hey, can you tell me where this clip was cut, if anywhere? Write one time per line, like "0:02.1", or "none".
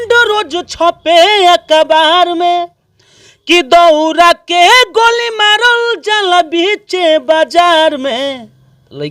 none